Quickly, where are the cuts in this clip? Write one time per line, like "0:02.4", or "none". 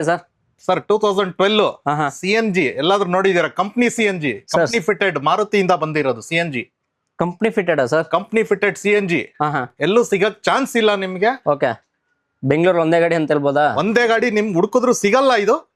none